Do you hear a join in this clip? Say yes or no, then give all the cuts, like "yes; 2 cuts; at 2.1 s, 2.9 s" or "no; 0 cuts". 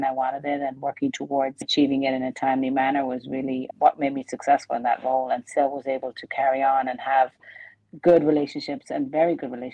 yes; 1 cut; at 1.7 s